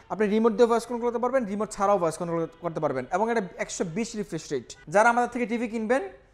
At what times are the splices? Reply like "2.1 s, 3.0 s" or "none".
4.8 s